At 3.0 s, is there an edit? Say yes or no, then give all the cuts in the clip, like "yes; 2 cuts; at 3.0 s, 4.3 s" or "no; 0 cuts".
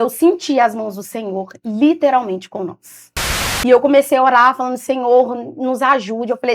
yes; 1 cut; at 3.0 s